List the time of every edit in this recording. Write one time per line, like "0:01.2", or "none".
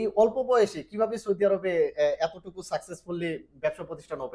none